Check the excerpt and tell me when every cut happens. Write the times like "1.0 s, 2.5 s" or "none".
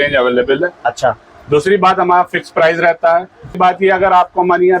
3.6 s